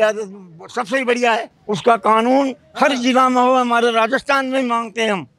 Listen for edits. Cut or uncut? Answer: cut